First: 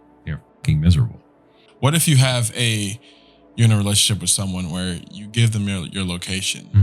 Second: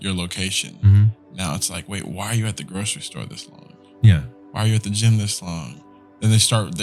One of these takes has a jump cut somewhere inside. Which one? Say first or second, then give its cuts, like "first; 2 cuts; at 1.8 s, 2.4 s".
first; 1 cut; at 1.6 s